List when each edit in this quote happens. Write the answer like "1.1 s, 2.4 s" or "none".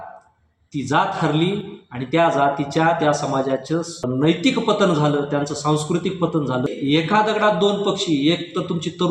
4.4 s, 6.6 s